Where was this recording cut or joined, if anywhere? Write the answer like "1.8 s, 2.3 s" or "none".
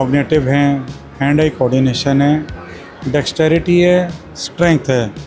none

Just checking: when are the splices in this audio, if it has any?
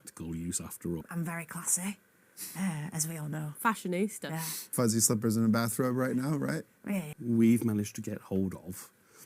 1.0 s, 4.6 s, 7.1 s

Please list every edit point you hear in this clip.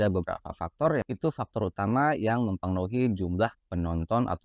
1.0 s

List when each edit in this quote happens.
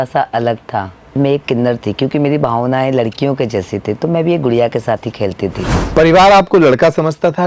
1.1 s, 5.7 s

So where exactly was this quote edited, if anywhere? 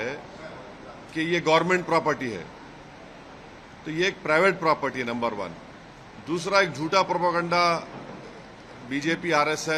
none

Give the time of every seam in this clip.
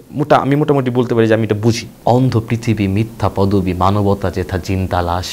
1.9 s

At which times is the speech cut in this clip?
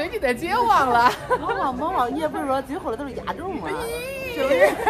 none

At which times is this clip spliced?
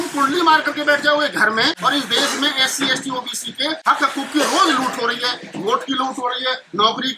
1.8 s, 3.8 s

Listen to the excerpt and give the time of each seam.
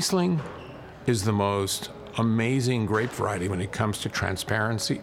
none

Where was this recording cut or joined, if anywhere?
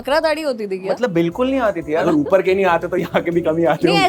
0.9 s, 2.0 s

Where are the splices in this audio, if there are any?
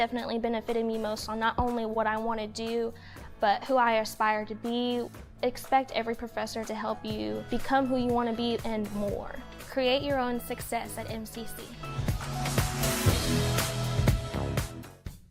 none

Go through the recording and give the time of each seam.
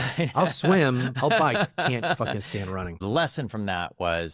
3.0 s

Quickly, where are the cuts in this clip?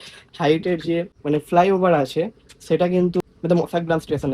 1.1 s, 3.2 s

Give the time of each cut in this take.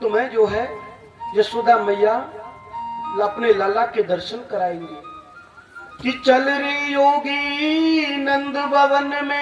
none

